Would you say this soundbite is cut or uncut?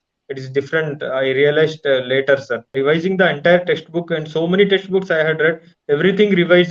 cut